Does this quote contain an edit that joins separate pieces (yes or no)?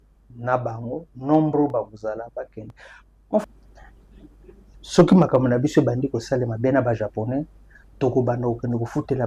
yes